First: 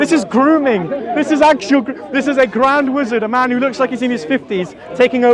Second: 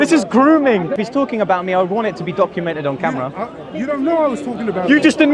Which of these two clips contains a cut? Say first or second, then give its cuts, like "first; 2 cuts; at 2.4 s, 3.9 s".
second; 1 cut; at 1.0 s